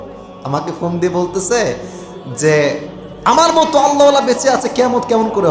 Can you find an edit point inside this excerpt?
no; 0 cuts

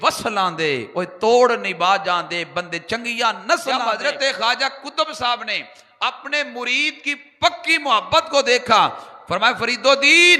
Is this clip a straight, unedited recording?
no; 1 cut; at 3.8 s

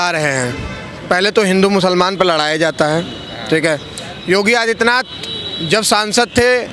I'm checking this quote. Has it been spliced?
no; 0 cuts

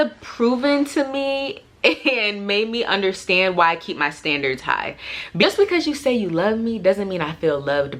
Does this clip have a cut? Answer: yes; 1 cut; at 5.4 s

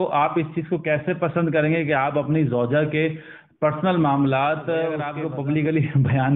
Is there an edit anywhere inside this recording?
yes; 1 cut; at 5.1 s

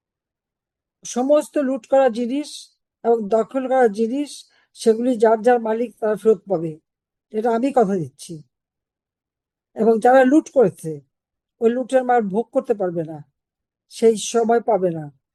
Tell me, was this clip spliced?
no; 0 cuts

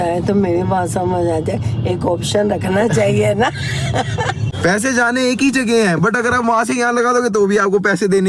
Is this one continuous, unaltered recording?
no; 1 cut; at 4.5 s

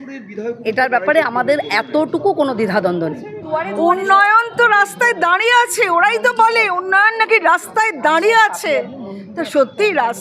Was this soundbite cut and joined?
yes; 1 cut; at 3.3 s

